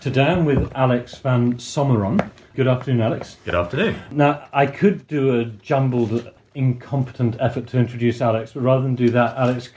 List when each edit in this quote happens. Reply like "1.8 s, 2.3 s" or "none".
2.5 s, 4.1 s, 6.3 s